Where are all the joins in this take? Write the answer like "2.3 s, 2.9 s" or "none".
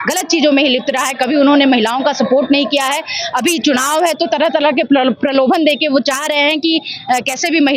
none